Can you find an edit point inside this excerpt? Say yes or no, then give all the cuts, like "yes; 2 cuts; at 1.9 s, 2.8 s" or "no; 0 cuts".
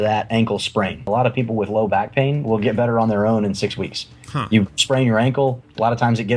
yes; 1 cut; at 1.1 s